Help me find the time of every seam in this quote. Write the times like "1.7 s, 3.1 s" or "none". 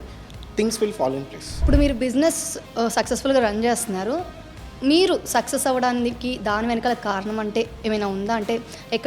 1.6 s